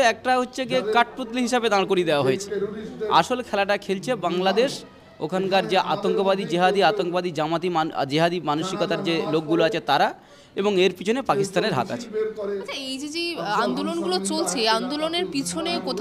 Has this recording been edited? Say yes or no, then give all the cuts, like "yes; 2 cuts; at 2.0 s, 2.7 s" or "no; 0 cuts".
no; 0 cuts